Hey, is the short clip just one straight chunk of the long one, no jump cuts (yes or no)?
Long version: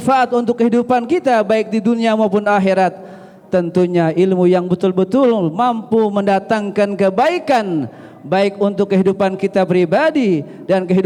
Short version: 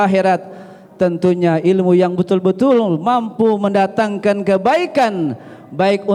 yes